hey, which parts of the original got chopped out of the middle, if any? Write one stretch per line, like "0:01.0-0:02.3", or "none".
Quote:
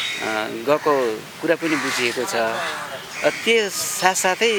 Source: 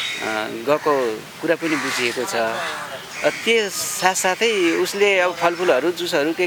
none

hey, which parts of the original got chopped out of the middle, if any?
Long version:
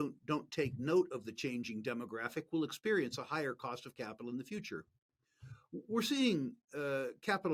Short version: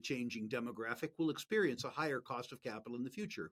none

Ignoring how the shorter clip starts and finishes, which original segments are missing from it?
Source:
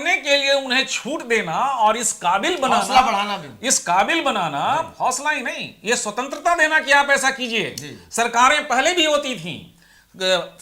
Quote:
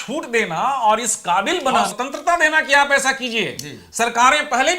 0:02.9-0:06.1

